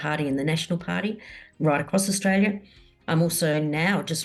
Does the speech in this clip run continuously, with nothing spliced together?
yes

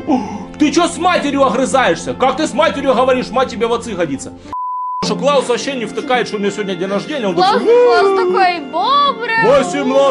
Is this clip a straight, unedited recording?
no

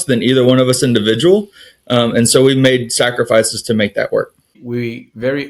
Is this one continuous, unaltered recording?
no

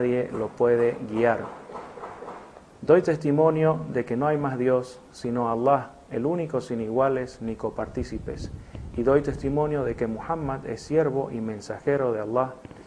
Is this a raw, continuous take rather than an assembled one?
no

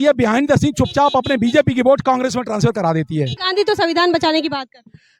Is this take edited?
yes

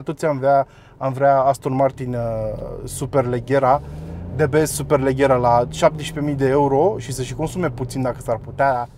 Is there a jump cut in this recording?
no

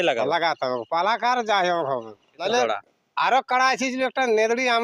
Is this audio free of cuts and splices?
no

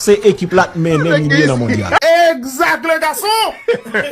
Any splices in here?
yes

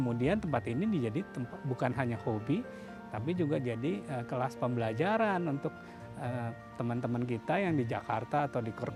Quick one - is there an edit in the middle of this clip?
no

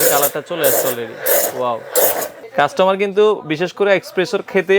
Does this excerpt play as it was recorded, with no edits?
no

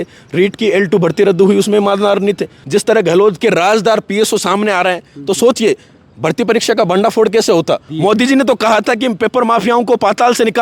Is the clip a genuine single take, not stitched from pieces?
no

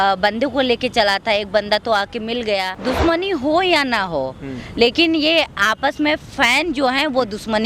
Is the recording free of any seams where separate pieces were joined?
no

